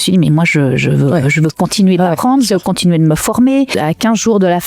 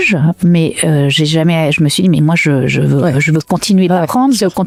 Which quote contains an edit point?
first; 1 cut; at 3.7 s

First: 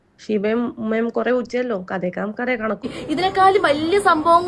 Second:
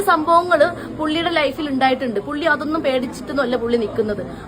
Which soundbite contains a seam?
first; 1 cut; at 2.9 s

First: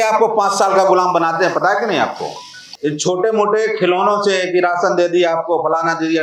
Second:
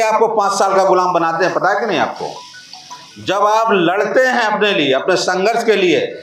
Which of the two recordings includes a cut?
first; 1 cut; at 2.7 s

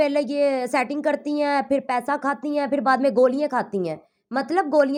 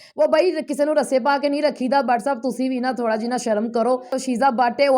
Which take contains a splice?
second; 1 cut; at 4.1 s

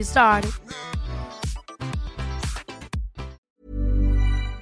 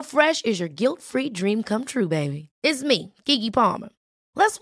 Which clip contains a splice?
first; 1 cut; at 3.4 s

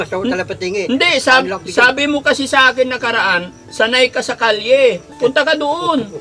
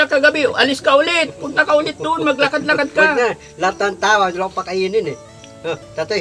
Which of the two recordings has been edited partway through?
first; 1 cut; at 5.1 s

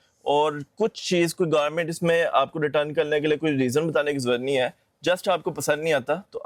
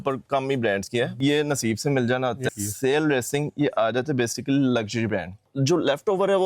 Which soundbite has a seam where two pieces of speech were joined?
second; 3 cuts; at 1.2 s, 2.5 s, 5.5 s

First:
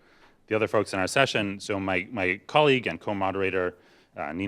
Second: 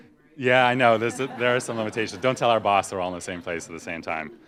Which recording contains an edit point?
first; 1 cut; at 1.7 s

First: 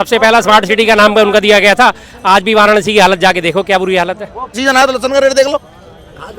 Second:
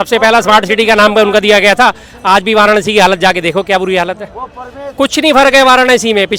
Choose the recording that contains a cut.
first; 1 cut; at 4.6 s

